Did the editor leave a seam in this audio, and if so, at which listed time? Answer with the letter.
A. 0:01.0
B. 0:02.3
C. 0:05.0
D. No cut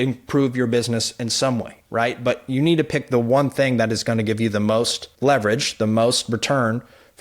C